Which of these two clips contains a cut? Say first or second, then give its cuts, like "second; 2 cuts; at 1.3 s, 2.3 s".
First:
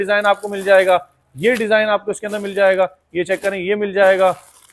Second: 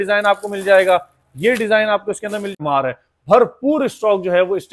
second; 1 cut; at 2.6 s